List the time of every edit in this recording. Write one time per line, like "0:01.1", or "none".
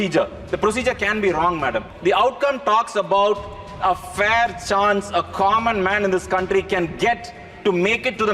0:01.9